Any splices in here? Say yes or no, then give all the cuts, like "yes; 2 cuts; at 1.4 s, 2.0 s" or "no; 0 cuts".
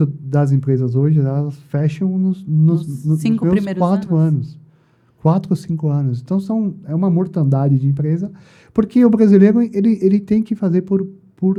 no; 0 cuts